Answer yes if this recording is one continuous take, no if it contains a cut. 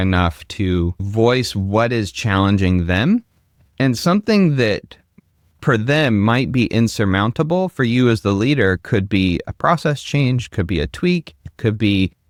yes